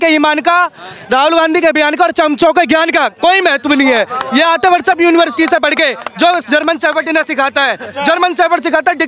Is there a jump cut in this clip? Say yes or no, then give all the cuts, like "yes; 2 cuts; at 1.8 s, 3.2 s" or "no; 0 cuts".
no; 0 cuts